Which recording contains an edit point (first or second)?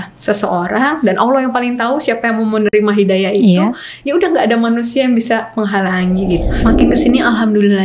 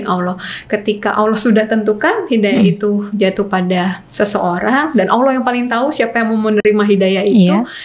first